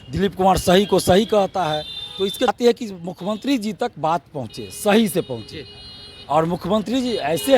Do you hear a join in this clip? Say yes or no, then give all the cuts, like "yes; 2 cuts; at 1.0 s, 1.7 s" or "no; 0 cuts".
yes; 1 cut; at 2.5 s